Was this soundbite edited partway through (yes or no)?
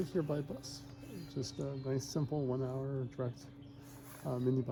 no